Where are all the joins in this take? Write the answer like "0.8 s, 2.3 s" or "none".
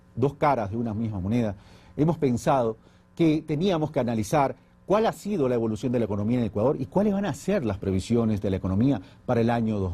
1.1 s